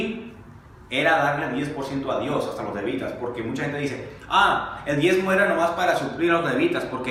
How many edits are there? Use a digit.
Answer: 0